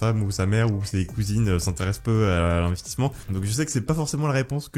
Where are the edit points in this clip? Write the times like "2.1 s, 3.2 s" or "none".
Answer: 3.2 s